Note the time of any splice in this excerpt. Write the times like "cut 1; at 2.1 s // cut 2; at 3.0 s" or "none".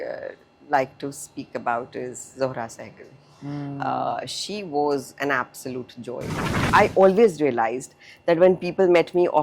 cut 1; at 6.6 s